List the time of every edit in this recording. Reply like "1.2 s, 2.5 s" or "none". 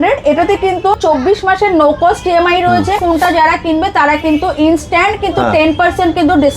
1.0 s, 3.0 s